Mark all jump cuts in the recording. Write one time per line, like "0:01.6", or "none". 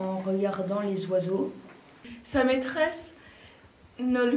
0:01.8